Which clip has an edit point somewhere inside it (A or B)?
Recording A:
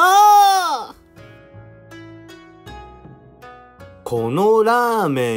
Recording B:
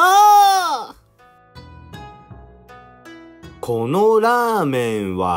B